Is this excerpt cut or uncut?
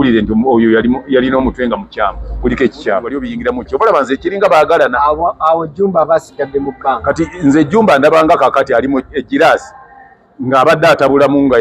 cut